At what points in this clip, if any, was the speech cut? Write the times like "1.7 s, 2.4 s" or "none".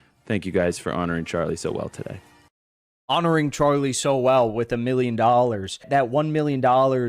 5.9 s